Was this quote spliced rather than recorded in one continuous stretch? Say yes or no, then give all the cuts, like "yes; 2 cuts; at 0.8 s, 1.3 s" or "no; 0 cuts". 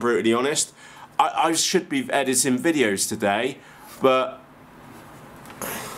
no; 0 cuts